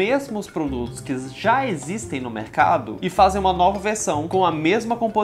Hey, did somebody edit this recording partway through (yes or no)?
yes